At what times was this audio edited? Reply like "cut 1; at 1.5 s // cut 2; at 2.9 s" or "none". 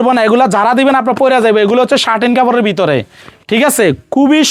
none